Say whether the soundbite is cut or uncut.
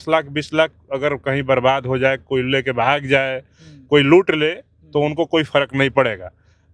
uncut